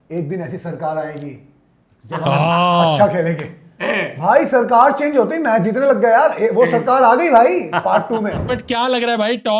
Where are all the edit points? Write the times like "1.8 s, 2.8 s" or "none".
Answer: 8.5 s